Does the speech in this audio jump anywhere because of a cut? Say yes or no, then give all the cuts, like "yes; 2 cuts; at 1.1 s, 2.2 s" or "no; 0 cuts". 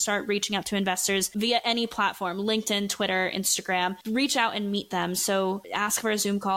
no; 0 cuts